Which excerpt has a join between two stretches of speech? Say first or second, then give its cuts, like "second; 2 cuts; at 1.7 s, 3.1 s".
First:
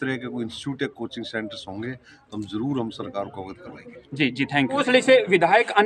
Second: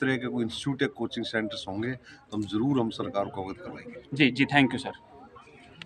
first; 1 cut; at 4.7 s